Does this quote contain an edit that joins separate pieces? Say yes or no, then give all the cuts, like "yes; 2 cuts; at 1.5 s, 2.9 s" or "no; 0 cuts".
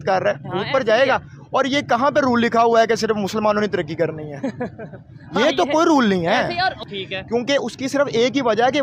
yes; 1 cut; at 6.8 s